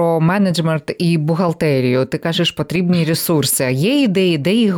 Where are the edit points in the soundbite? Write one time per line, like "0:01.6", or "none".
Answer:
none